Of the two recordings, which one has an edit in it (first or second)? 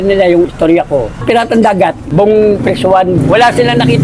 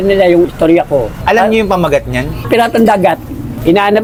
first